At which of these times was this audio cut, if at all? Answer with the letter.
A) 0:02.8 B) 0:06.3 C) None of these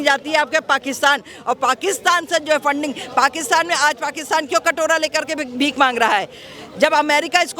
C